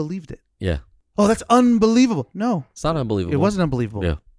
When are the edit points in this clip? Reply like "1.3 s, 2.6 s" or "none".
none